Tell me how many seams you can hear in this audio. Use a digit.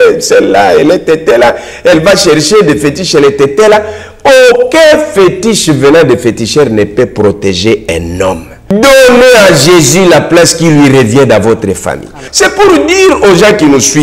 2